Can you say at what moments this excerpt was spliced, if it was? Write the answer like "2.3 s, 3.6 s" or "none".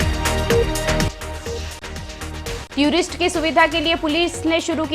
1.1 s